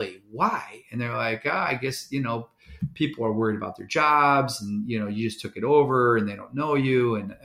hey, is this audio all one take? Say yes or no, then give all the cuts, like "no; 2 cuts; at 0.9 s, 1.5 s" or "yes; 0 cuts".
yes; 0 cuts